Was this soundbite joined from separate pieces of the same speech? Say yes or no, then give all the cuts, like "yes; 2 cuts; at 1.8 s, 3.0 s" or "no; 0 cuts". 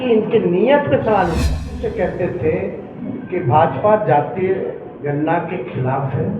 yes; 1 cut; at 1.8 s